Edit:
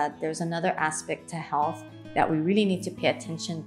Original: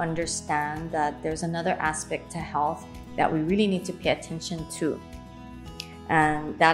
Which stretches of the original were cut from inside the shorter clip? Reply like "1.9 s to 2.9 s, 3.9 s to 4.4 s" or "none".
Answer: none